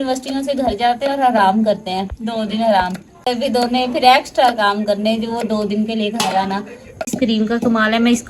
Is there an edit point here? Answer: yes; 2 cuts; at 3.3 s, 7.1 s

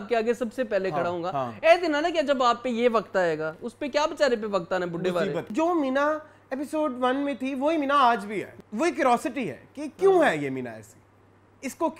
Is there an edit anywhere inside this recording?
yes; 2 cuts; at 5.5 s, 8.6 s

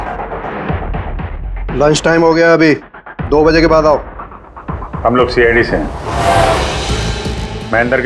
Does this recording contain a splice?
no; 0 cuts

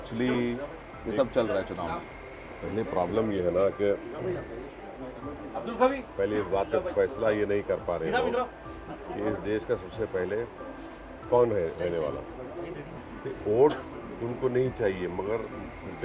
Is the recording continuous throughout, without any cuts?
no; 1 cut; at 13.0 s

